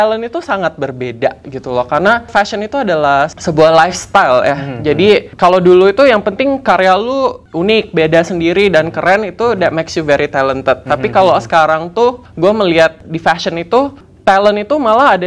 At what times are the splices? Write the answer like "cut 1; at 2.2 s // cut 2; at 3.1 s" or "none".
none

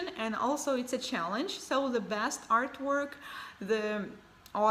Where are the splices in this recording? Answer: none

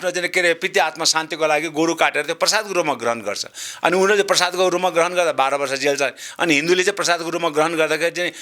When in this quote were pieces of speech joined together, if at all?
none

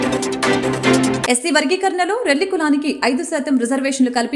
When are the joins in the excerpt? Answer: cut 1; at 1.2 s

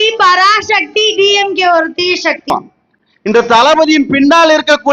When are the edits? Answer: cut 1; at 2.5 s

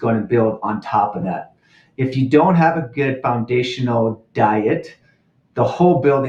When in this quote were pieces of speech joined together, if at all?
none

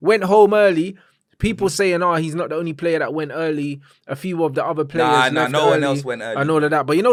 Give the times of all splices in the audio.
none

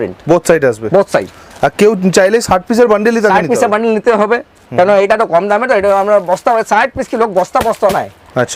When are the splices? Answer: none

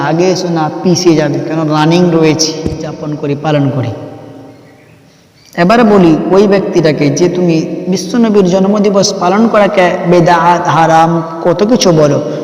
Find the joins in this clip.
cut 1; at 3.1 s

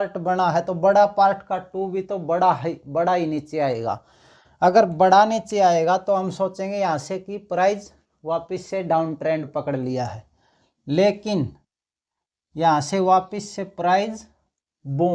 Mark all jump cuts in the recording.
none

